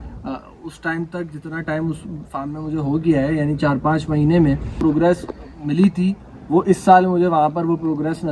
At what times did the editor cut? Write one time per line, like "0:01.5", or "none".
0:04.8